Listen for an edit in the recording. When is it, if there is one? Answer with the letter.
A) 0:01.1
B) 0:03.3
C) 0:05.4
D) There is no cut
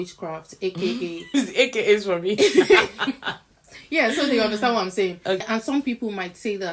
C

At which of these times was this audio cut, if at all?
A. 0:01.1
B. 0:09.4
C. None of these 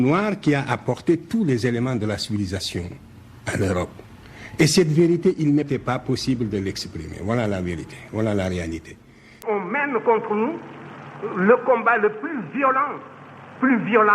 B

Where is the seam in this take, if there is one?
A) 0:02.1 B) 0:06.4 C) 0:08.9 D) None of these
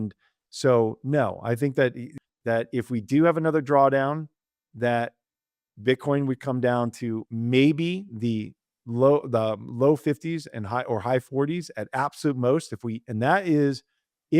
A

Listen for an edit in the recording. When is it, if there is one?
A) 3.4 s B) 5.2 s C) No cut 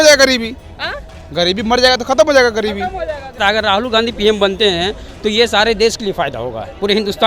A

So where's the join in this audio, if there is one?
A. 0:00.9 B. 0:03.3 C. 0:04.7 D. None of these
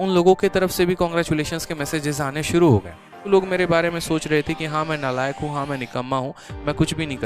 B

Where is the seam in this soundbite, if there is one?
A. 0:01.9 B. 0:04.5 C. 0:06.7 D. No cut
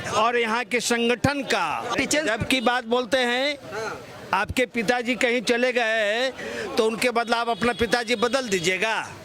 A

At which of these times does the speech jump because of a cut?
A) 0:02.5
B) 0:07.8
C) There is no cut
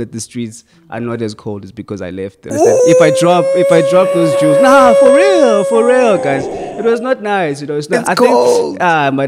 A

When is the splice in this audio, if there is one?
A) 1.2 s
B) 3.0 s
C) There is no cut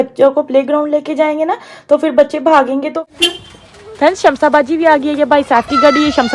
B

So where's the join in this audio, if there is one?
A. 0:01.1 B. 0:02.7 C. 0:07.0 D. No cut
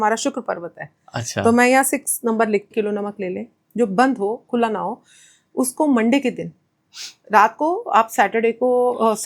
B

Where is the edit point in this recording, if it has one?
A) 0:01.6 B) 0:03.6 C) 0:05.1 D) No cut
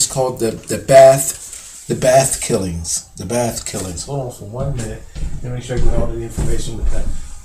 C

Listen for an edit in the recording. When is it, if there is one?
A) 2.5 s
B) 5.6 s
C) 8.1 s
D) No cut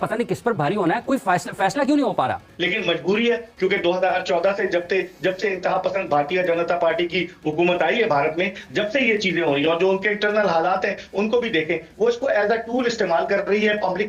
A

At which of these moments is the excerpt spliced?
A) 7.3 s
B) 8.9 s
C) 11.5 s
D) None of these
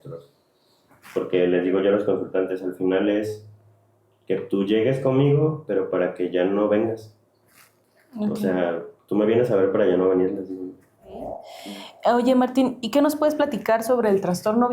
C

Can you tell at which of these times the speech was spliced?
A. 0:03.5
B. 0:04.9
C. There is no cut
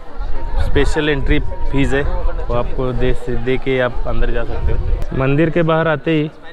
B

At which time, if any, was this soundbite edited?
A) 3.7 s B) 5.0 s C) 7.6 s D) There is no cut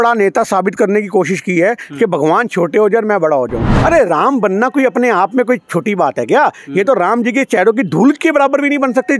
A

